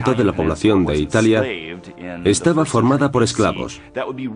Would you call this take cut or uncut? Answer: cut